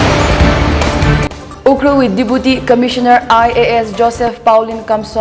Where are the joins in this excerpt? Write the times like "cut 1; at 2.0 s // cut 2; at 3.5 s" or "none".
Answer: cut 1; at 1.4 s